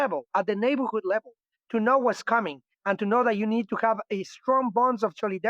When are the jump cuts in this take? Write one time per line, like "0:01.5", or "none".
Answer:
none